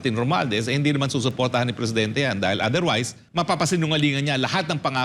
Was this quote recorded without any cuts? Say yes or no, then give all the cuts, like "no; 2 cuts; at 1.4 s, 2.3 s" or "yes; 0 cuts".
no; 1 cut; at 3.2 s